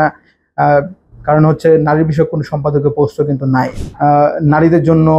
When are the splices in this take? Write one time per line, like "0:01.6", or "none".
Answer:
0:03.8